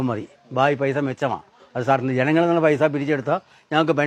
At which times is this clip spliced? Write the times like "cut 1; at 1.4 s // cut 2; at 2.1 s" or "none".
none

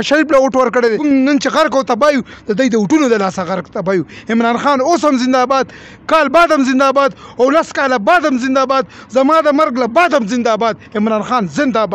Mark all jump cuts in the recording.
cut 1; at 1.0 s

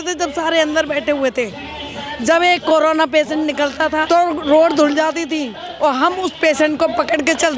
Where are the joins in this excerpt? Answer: cut 1; at 4.0 s

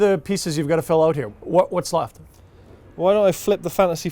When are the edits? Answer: cut 1; at 1.3 s

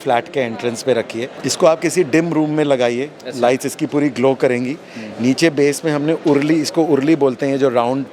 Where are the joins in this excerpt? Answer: cut 1; at 1.3 s

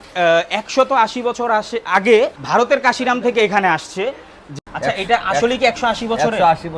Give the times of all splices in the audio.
cut 1; at 2.4 s // cut 2; at 4.4 s

